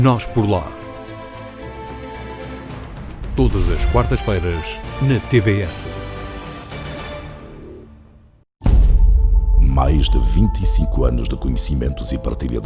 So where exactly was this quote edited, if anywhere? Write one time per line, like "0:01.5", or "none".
0:08.6